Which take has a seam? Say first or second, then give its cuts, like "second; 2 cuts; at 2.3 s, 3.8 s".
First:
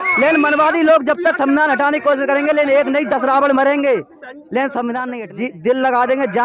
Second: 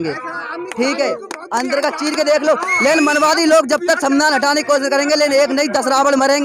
first; 1 cut; at 5.2 s